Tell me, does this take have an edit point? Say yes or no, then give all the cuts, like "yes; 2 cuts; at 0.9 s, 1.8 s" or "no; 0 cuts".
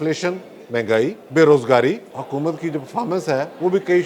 yes; 2 cuts; at 1.2 s, 2.1 s